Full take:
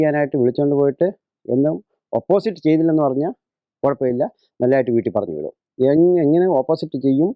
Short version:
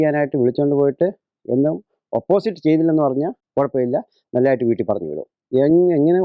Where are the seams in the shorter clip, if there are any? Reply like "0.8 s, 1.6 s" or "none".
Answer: 3.4 s